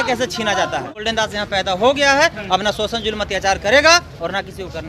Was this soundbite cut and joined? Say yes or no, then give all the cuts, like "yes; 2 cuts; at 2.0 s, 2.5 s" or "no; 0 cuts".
yes; 1 cut; at 0.9 s